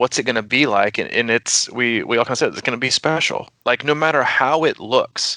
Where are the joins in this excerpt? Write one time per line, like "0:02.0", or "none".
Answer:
none